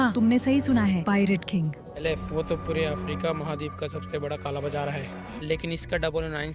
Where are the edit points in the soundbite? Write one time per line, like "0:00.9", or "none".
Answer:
0:01.9
0:05.3